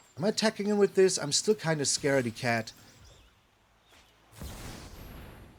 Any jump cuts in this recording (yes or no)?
yes